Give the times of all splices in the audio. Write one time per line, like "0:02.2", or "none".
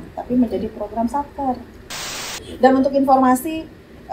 0:02.2